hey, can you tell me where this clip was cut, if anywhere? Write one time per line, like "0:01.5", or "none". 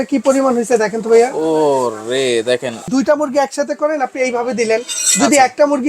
0:02.9